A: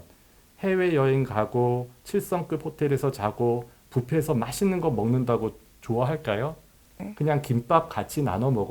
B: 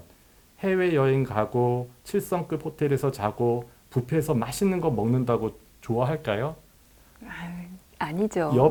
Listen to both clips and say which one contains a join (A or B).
A